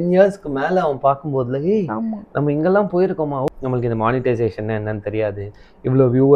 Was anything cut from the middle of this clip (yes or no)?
yes